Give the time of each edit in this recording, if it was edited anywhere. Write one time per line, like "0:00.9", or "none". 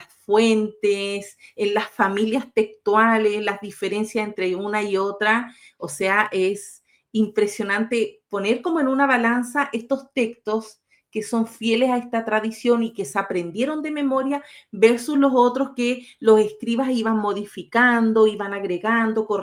none